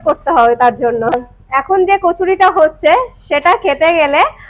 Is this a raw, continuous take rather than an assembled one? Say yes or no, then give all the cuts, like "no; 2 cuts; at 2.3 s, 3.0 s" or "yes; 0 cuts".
no; 1 cut; at 1.3 s